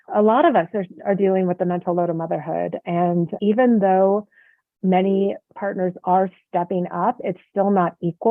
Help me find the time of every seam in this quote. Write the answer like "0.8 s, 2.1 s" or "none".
5.5 s